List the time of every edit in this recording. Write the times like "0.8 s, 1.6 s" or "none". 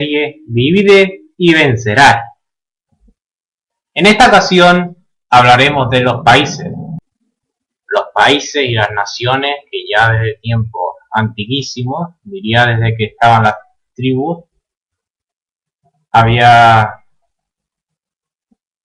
none